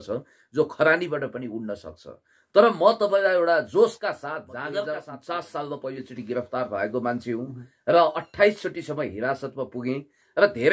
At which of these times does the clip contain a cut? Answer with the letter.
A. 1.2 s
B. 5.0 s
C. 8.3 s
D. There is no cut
B